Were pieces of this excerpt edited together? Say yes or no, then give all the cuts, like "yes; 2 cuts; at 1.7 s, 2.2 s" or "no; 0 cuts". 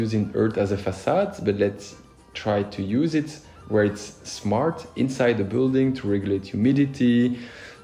no; 0 cuts